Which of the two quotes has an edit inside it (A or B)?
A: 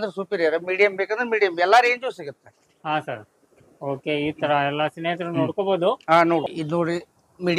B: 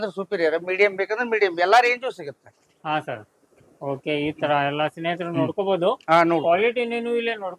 A